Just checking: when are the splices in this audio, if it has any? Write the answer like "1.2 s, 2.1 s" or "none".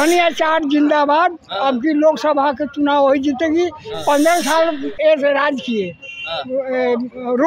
none